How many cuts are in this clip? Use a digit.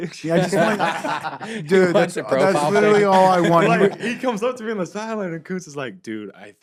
0